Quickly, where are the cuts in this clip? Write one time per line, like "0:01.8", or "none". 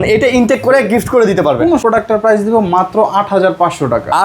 0:01.8